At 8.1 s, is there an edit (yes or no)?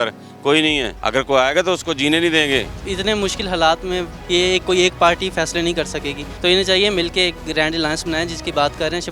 no